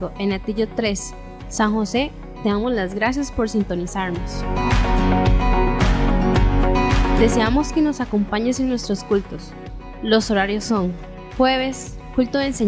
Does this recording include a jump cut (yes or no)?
yes